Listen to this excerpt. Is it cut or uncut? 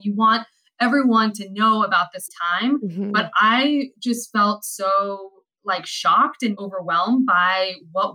cut